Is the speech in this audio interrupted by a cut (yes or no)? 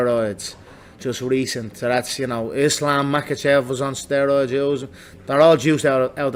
no